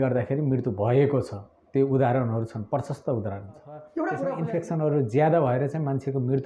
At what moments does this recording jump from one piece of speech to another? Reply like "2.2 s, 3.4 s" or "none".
4.3 s